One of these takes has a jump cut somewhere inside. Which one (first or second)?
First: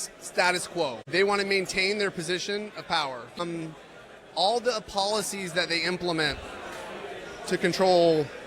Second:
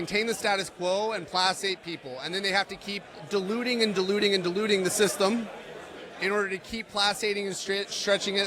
first